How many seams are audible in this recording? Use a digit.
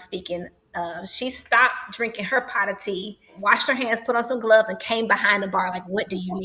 1